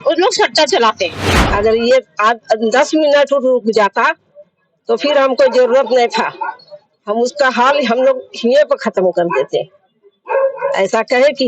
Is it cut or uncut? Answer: cut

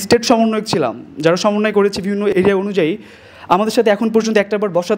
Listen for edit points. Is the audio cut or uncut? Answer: uncut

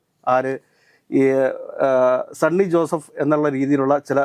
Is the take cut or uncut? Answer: uncut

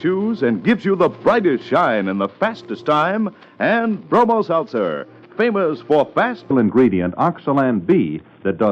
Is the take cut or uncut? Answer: uncut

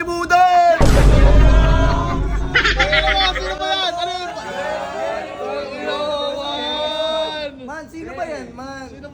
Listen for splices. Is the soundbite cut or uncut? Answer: uncut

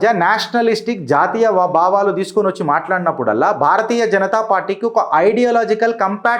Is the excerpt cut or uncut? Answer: uncut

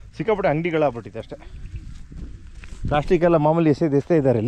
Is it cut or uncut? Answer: uncut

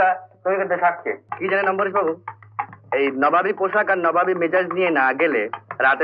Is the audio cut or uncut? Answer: cut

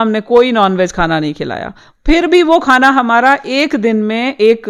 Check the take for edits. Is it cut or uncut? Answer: uncut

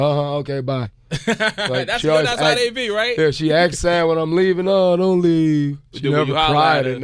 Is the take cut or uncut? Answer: cut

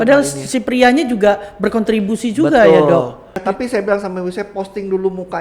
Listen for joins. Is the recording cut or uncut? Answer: cut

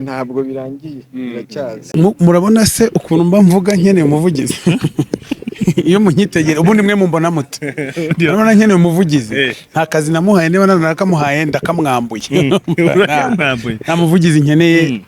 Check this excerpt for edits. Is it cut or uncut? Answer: cut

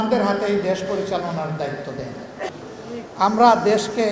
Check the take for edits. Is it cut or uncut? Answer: cut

